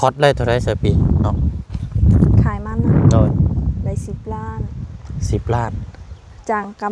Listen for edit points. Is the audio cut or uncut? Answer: uncut